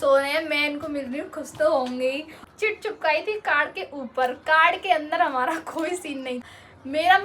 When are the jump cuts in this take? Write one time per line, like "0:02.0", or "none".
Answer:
0:02.4
0:06.4